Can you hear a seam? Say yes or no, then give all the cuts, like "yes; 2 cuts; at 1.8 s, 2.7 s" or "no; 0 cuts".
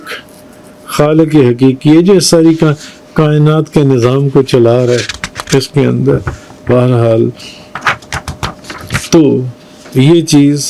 no; 0 cuts